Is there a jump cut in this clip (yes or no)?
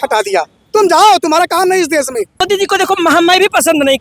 yes